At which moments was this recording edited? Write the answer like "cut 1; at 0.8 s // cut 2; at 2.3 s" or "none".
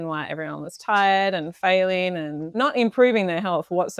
cut 1; at 2.5 s